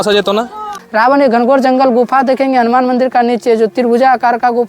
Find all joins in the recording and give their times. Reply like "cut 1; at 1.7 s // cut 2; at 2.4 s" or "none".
cut 1; at 0.9 s